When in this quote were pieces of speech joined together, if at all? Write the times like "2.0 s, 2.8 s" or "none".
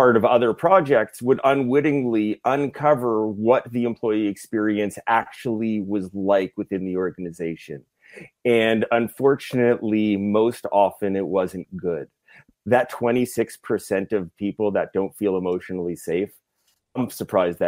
none